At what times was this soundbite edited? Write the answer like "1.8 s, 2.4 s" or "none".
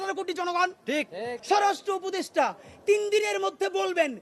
1.4 s